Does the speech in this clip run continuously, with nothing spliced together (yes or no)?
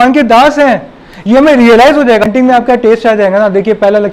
no